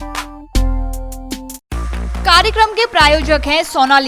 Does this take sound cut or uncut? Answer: uncut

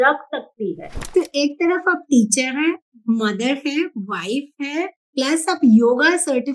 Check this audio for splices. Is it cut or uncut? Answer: cut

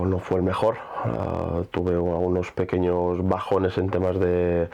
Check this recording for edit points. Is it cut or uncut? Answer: uncut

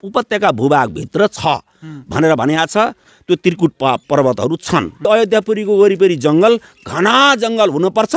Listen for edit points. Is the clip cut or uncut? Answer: cut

